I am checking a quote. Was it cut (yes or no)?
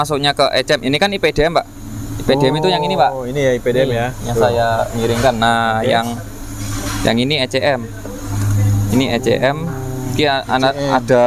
no